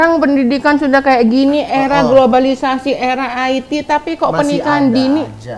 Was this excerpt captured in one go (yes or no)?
yes